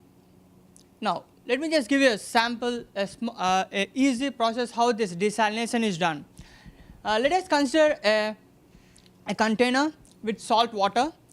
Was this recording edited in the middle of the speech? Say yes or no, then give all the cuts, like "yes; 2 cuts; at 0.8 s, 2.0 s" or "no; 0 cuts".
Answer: yes; 1 cut; at 4.2 s